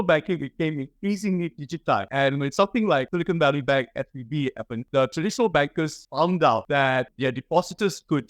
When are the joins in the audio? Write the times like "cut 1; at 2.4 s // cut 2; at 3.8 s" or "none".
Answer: cut 1; at 2.1 s // cut 2; at 3.1 s // cut 3; at 4.8 s // cut 4; at 6.0 s // cut 5; at 7.0 s